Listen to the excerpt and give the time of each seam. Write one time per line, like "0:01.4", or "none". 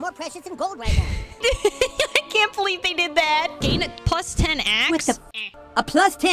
0:01.4
0:03.6